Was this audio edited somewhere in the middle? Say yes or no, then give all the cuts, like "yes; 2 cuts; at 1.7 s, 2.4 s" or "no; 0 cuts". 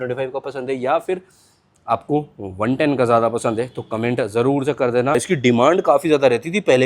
yes; 1 cut; at 5.2 s